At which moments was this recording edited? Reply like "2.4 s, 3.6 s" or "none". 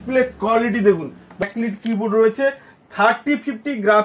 1.4 s